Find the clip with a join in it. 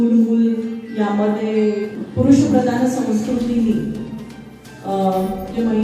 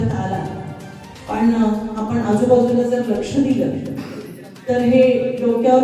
first; 1 cut; at 2.0 s

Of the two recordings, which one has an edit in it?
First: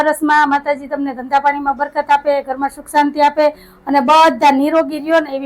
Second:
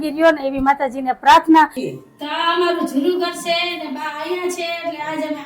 second; 1 cut; at 1.8 s

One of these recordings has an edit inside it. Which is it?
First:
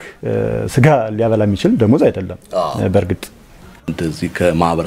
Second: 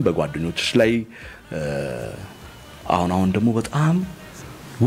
first; 1 cut; at 3.9 s

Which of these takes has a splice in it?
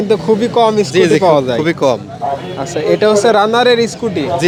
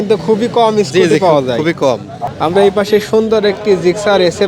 second; 1 cut; at 2.2 s

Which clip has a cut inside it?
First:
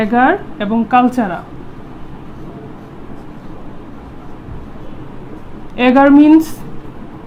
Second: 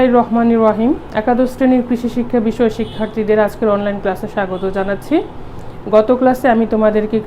second; 1 cut; at 1.1 s

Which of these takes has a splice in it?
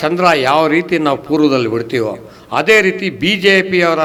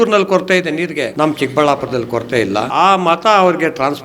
second; 2 cuts; at 1.1 s, 2.7 s

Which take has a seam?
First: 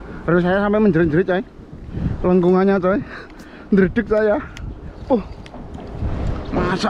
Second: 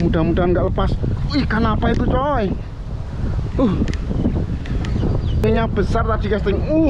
second; 1 cut; at 5.4 s

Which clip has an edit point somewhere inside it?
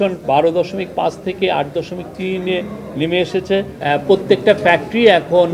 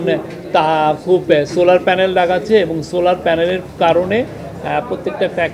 first; 1 cut; at 3.8 s

